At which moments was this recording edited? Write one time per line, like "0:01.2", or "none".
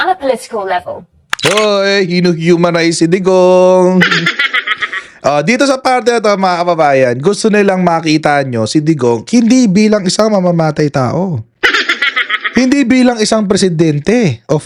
none